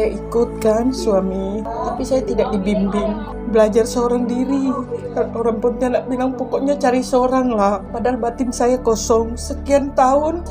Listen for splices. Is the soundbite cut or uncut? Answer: uncut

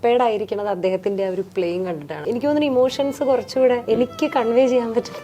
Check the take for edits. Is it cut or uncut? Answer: cut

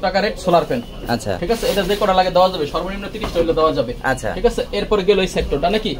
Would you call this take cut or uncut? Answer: uncut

